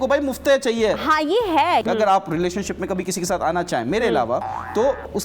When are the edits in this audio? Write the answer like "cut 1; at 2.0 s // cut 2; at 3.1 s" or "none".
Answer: cut 1; at 1.8 s